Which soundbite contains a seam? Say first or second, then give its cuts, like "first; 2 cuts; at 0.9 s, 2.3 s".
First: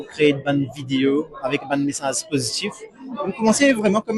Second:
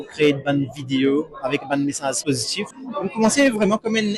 second; 1 cut; at 2.2 s